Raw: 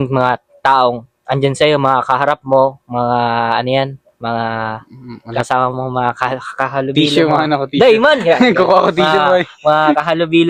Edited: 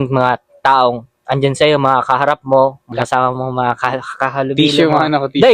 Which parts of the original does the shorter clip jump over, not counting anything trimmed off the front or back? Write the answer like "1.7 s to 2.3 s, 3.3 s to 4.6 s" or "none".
2.8 s to 5.2 s

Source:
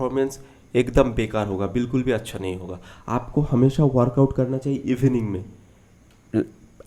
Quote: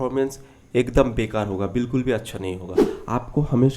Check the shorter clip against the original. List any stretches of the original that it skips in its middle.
none

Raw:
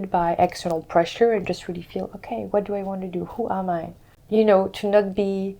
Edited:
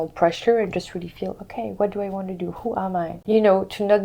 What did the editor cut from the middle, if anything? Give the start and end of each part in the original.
3.9 s to 4.2 s

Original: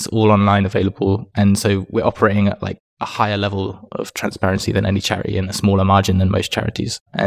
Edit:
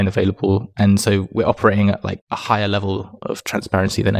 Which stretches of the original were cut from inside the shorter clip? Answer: 2.8 s to 2.9 s

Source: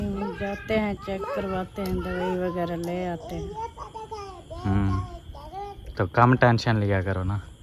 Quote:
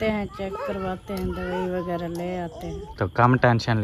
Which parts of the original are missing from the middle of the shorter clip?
3.5 s to 5.8 s

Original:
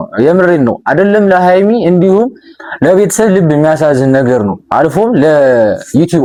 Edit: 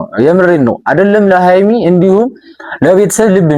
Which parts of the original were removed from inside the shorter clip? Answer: none

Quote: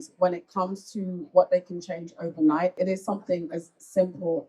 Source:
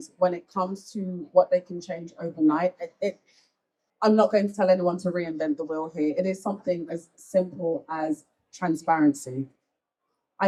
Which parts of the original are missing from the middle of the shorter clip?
2.8 s to 6.1 s

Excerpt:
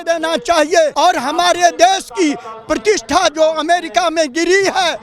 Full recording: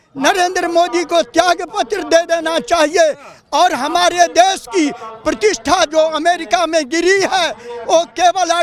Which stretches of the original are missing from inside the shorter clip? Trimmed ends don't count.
3.1 s to 3.5 s

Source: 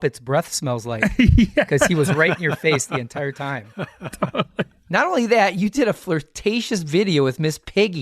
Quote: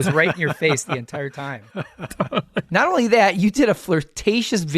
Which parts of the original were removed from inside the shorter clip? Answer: 4.7 s to 4.9 s

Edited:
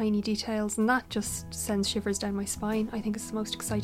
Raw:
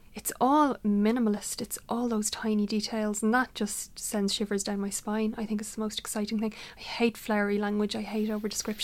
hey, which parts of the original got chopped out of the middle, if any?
none

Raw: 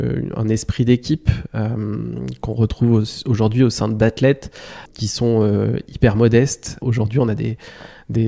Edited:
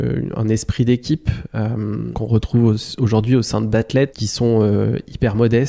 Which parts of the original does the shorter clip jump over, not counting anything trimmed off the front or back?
2.1 s to 2.4 s, 4.5 s to 5.0 s

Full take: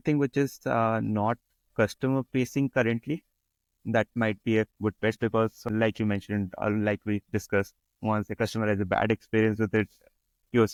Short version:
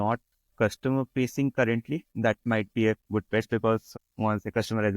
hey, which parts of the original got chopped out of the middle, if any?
3.3 s to 3.8 s, 5.6 s to 7.7 s

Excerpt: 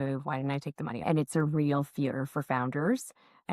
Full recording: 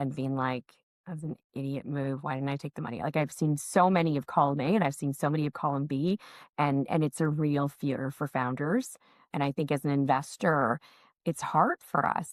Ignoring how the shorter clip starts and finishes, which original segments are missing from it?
3.0 s to 6.9 s

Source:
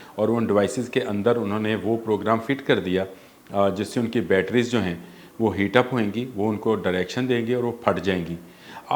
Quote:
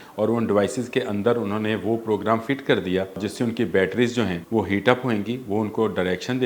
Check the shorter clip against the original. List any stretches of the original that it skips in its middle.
3.2 s to 3.8 s, 5.0 s to 5.3 s

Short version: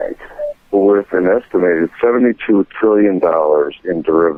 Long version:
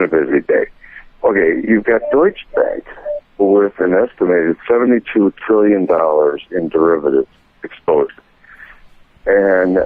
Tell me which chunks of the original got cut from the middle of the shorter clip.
none

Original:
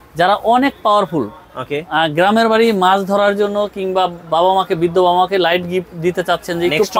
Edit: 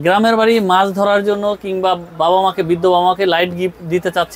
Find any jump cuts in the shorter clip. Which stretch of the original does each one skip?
none

